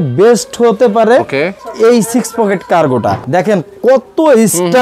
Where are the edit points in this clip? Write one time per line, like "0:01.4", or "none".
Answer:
0:01.6
0:03.2